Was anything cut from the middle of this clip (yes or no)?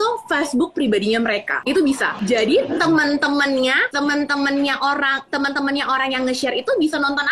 yes